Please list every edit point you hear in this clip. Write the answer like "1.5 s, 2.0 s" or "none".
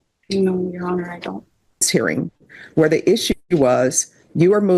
1.9 s

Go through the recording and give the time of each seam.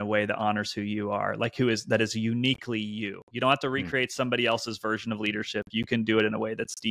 none

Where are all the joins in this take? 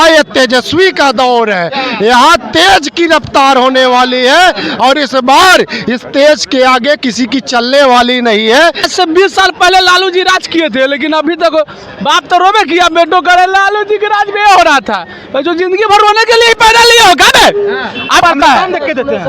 8.8 s, 18.2 s

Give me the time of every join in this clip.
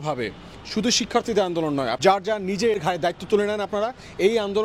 1.9 s, 2.8 s

